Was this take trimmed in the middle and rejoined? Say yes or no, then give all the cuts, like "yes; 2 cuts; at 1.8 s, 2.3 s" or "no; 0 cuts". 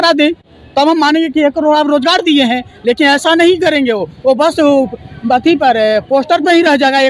no; 0 cuts